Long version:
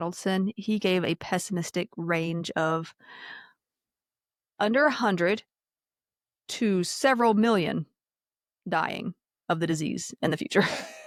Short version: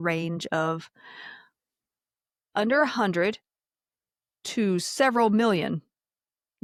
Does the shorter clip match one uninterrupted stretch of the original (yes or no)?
yes